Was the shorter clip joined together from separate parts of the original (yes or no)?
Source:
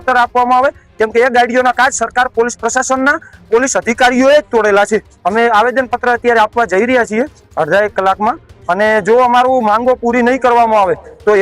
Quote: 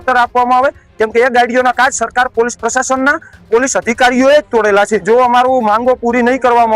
yes